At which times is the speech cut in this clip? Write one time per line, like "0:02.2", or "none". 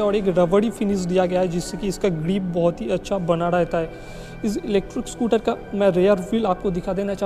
none